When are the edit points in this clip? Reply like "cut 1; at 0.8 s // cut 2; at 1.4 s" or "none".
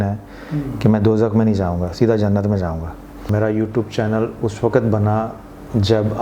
cut 1; at 3.3 s